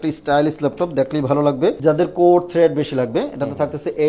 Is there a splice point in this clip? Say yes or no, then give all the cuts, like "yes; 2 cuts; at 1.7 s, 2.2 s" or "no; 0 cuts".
yes; 1 cut; at 1.8 s